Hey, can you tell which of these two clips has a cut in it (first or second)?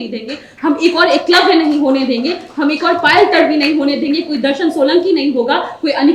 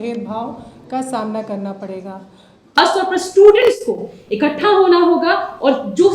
second